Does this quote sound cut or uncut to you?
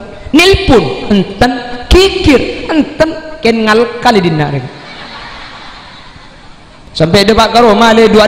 cut